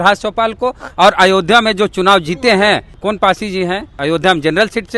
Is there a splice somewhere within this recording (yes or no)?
yes